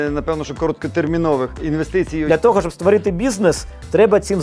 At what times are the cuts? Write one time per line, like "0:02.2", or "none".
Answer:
0:02.0